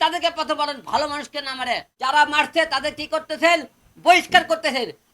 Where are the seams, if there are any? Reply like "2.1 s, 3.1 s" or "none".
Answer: 1.9 s